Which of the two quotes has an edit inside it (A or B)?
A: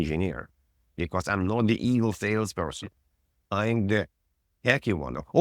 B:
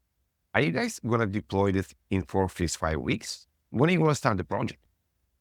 A